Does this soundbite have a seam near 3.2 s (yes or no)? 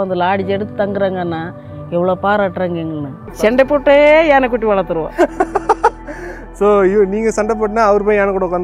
yes